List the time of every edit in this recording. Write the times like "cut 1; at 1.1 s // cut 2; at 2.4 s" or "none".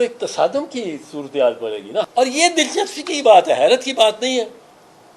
cut 1; at 2.0 s

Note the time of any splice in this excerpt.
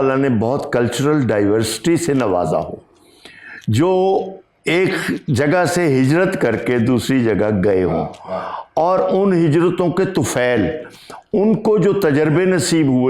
none

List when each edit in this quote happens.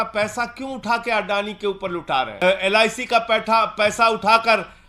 cut 1; at 2.3 s

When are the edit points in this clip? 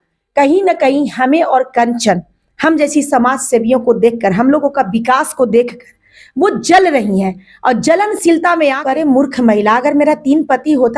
cut 1; at 8.8 s

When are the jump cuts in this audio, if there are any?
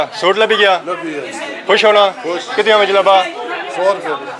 none

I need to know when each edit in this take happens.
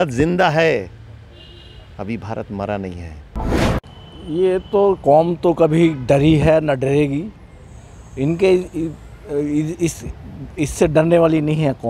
cut 1; at 3.7 s

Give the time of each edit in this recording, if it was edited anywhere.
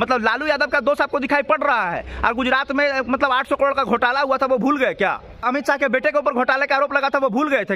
cut 1; at 5.4 s

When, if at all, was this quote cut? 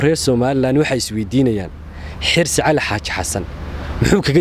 none

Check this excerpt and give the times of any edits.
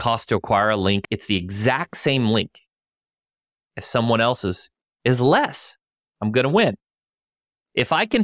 cut 1; at 1.0 s

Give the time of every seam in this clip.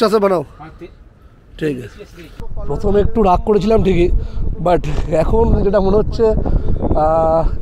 cut 1; at 1.9 s

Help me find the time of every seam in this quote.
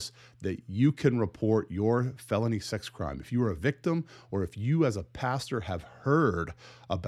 none

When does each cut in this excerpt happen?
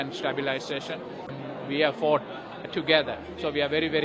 cut 1; at 1.4 s

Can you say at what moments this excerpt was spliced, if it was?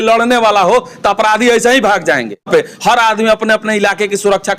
cut 1; at 2.5 s

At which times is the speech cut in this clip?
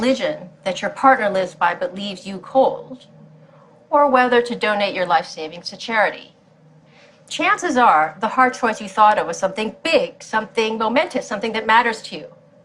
cut 1; at 1.3 s

